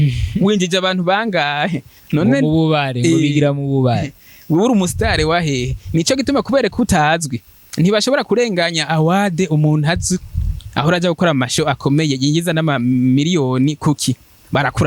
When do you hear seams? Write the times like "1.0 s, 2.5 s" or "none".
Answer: none